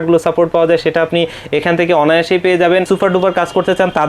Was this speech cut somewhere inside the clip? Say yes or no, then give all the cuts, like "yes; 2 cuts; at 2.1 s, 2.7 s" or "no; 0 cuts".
yes; 1 cut; at 2.8 s